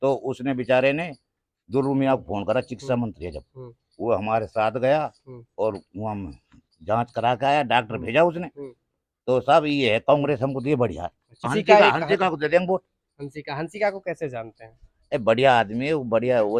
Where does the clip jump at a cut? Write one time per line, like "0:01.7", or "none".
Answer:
0:11.5

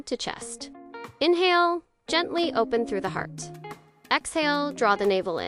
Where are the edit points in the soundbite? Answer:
none

